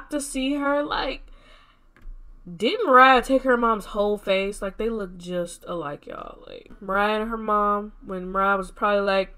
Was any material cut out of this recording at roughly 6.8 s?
yes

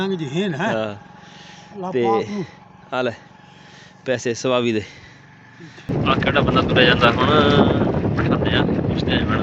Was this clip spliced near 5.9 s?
yes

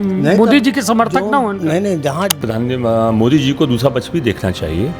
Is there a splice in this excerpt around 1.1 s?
no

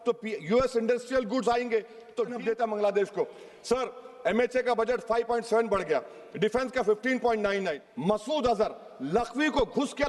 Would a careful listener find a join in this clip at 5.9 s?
no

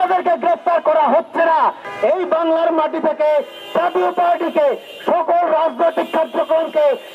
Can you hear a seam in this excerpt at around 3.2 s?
no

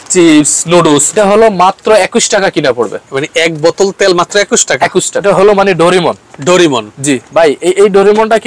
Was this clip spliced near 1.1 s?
yes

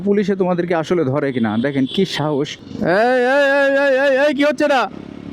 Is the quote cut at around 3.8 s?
no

